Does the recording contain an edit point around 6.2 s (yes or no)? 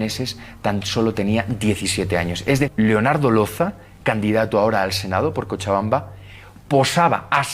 no